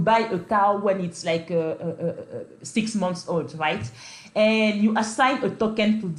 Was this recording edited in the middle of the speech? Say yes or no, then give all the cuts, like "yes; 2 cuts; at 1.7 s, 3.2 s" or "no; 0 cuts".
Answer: no; 0 cuts